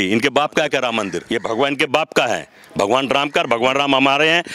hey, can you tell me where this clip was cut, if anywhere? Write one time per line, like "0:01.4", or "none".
0:01.2